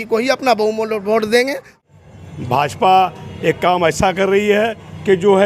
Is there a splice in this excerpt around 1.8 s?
yes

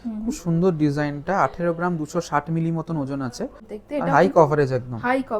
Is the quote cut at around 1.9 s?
no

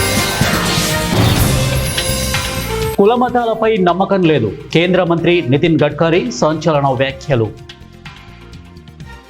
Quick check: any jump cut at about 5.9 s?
no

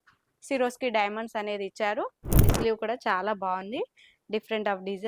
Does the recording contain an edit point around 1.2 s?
no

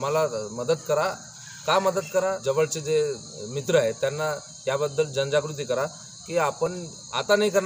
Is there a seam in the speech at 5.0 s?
no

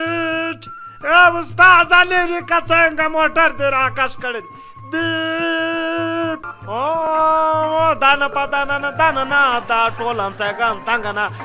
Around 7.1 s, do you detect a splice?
yes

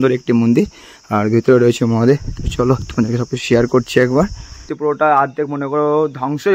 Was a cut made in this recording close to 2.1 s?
no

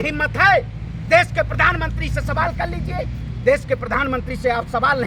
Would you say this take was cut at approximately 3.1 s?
no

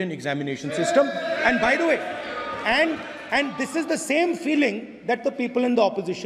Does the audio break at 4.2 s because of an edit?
no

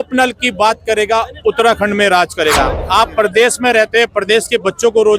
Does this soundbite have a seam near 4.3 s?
no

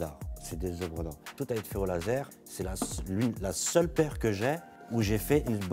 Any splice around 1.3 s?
yes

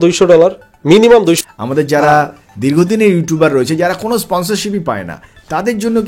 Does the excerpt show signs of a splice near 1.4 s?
yes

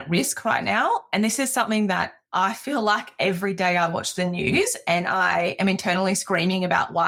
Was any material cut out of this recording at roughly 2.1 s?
no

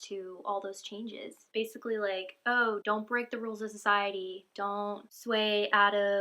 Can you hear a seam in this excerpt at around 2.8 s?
yes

